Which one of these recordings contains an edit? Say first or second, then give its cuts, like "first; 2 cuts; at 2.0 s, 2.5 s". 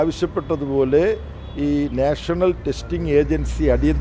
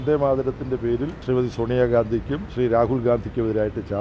second; 2 cuts; at 1.1 s, 2.4 s